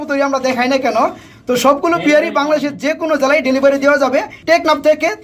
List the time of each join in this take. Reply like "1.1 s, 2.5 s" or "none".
4.3 s

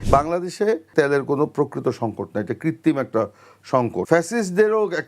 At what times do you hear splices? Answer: 0.9 s, 4.0 s

